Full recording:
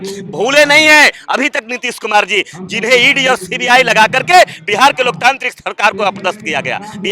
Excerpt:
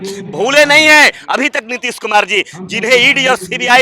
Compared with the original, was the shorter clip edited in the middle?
no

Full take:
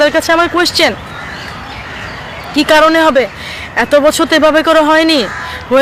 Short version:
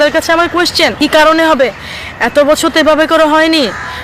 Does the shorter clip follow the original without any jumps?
no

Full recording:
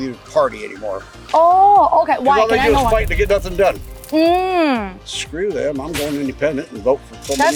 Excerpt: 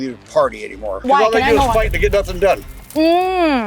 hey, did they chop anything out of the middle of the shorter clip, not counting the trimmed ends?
yes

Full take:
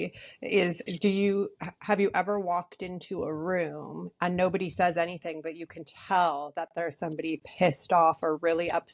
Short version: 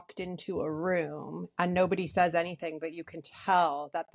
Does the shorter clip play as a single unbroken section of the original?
yes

